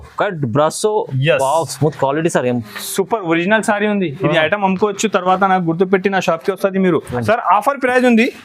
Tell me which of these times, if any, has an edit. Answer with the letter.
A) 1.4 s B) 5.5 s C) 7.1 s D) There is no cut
C